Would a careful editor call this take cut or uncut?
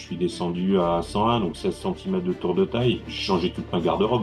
cut